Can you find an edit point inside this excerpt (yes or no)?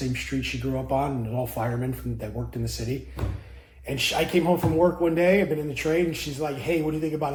no